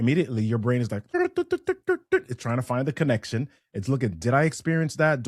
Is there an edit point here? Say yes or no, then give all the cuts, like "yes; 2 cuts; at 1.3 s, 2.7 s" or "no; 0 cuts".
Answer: yes; 1 cut; at 1.1 s